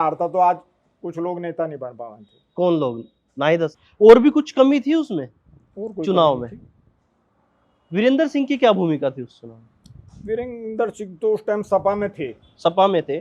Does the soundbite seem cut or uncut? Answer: cut